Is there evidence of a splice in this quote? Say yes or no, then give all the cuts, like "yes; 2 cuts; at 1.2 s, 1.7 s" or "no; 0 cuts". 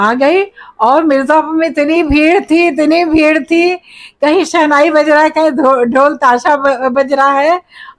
no; 0 cuts